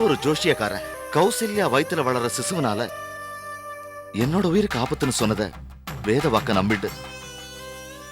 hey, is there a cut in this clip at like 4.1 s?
no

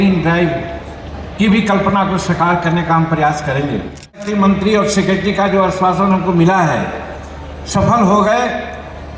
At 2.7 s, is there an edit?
no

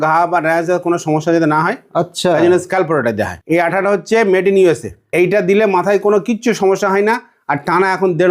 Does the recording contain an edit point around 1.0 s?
no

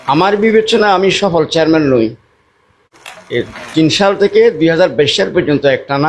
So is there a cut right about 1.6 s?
no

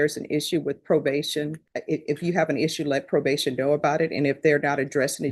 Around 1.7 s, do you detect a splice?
yes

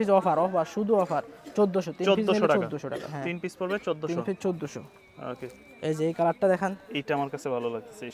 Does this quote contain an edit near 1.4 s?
no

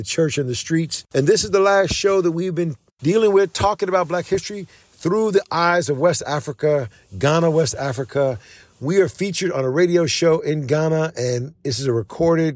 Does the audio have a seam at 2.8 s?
yes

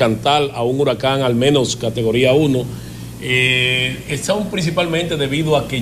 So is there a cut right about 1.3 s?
no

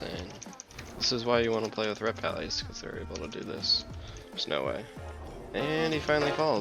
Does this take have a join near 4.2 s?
yes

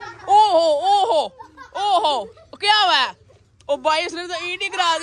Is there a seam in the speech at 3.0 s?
no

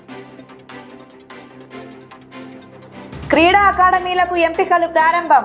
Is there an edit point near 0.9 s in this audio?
yes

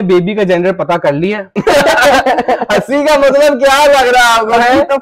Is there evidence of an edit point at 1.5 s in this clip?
no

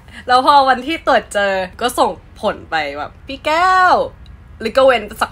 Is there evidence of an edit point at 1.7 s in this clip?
yes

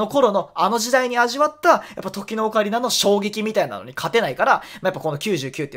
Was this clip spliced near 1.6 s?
no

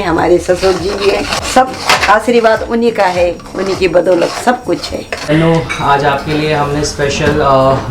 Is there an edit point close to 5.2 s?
yes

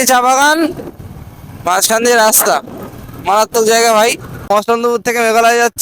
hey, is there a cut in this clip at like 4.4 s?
yes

